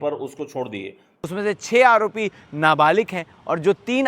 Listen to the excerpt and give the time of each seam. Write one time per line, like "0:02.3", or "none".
0:01.1

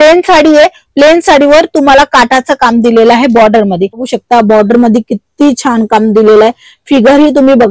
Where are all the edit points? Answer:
0:04.1

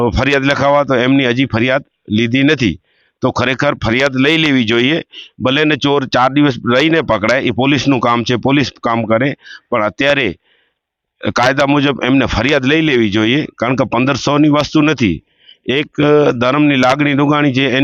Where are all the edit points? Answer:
none

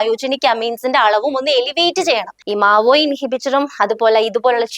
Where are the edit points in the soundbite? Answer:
0:02.4

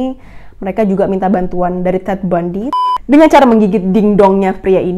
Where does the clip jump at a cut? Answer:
0:02.7

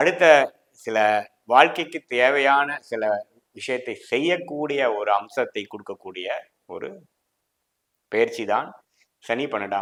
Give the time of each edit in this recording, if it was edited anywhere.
none

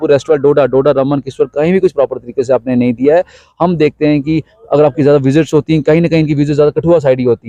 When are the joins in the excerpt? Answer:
none

